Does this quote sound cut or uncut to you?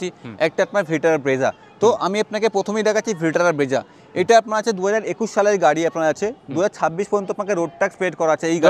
uncut